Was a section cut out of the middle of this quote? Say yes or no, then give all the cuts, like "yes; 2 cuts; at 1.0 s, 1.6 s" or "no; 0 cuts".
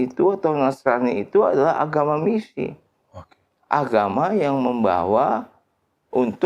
no; 0 cuts